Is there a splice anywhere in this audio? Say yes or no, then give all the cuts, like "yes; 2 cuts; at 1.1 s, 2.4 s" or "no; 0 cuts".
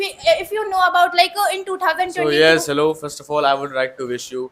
no; 0 cuts